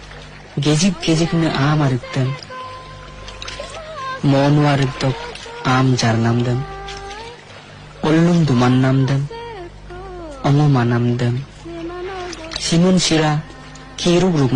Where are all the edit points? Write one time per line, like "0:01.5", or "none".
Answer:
none